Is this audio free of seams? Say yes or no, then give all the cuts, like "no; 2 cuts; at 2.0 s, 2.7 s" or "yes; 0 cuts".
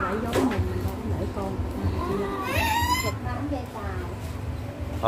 no; 1 cut; at 3.0 s